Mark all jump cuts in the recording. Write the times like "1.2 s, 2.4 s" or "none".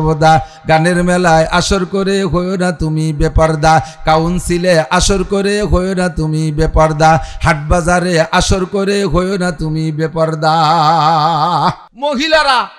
11.9 s

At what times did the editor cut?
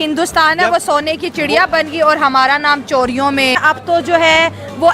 3.6 s

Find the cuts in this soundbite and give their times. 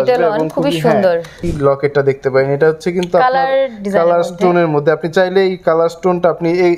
1.4 s

